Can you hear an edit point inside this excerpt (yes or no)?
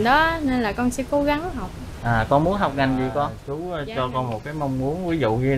yes